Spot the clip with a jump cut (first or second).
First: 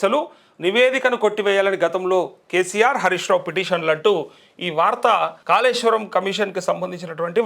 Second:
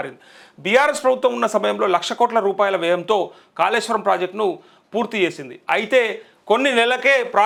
first